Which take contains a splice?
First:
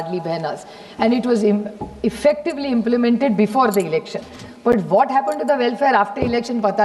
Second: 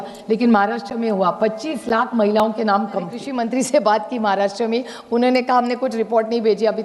second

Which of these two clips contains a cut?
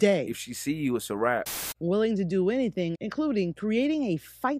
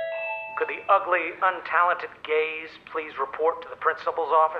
first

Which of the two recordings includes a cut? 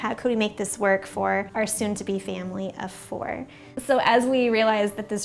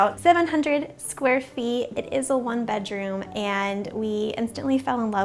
second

